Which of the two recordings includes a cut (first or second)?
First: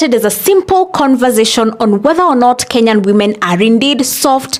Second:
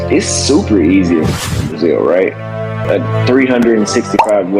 second